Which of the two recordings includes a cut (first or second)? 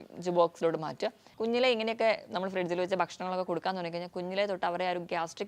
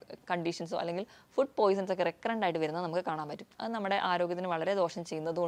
first